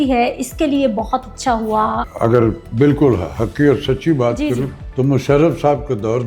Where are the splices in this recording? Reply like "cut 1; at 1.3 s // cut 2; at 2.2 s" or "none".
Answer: cut 1; at 2.0 s // cut 2; at 4.8 s